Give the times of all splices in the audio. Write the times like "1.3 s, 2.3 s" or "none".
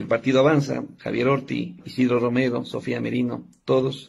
1.8 s